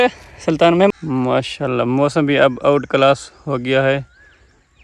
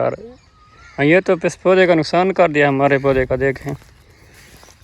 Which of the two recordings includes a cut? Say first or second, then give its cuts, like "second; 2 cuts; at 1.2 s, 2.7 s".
first; 1 cut; at 0.9 s